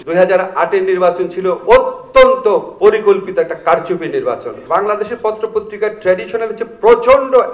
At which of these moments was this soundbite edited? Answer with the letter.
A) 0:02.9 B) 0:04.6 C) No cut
B